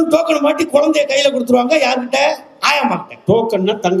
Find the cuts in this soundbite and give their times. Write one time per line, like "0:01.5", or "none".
none